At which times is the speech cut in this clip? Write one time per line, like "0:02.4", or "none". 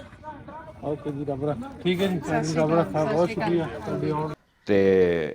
0:04.3